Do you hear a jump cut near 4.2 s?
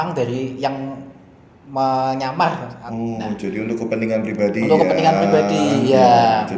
no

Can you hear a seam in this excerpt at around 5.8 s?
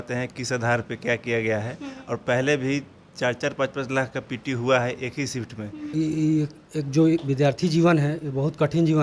yes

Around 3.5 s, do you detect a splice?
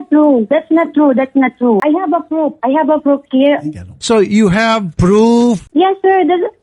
no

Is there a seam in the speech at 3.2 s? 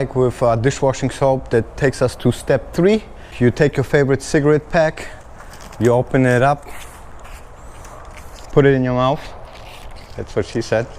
yes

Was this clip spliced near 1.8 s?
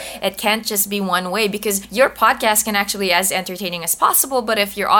yes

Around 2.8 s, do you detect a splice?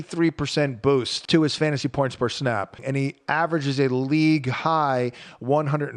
yes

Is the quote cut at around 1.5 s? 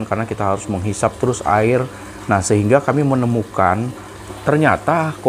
no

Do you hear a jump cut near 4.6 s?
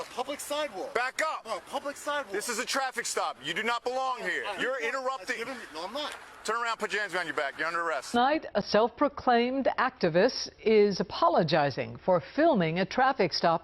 yes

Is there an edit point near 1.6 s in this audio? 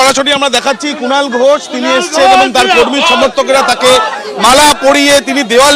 no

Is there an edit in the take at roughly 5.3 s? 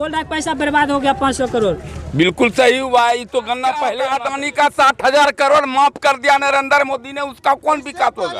no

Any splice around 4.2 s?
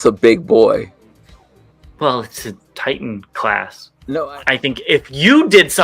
yes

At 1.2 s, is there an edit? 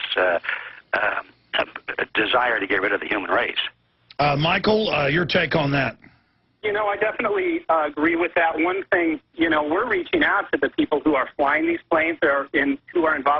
yes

